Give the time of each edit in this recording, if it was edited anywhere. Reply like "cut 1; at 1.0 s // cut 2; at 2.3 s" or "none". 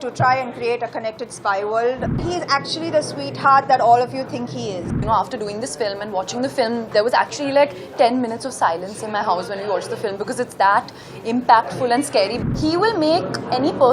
cut 1; at 2.2 s // cut 2; at 5.0 s // cut 3; at 12.4 s